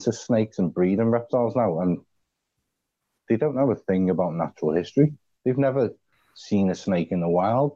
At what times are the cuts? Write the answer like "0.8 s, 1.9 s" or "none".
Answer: none